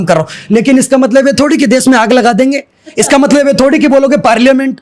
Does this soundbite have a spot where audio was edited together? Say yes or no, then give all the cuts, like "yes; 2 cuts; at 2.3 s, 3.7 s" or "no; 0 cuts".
no; 0 cuts